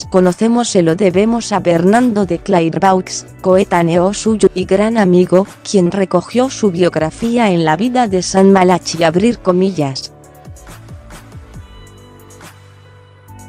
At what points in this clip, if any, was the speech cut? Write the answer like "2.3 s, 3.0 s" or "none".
none